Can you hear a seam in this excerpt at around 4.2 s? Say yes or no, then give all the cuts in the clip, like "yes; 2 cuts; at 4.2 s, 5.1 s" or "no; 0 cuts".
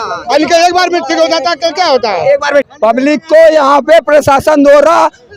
no; 1 cut; at 2.7 s